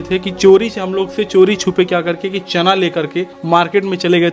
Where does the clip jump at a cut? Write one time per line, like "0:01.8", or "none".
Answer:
0:03.4